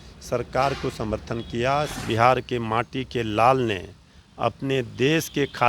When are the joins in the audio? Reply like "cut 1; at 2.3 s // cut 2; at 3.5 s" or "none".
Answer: cut 1; at 1.9 s